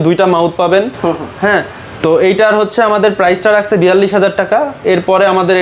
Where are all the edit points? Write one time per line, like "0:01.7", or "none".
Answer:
none